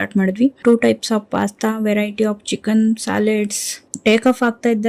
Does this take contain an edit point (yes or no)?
yes